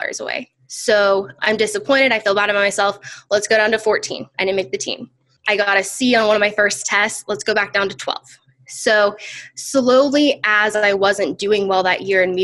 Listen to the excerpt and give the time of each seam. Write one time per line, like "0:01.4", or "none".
0:01.3
0:05.3